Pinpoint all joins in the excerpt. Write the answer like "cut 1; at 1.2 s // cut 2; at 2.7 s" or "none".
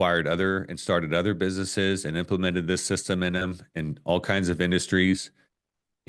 none